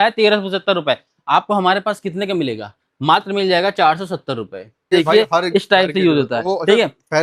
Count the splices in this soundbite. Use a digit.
1